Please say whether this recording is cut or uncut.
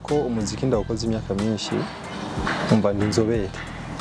uncut